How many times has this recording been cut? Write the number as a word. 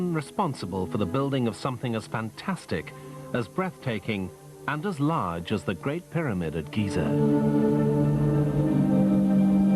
zero